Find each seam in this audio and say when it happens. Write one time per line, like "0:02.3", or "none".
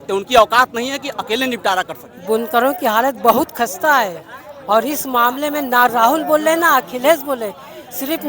0:02.1